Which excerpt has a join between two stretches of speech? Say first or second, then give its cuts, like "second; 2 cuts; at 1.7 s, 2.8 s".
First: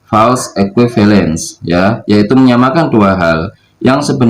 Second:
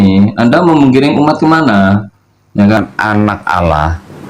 second; 1 cut; at 2.8 s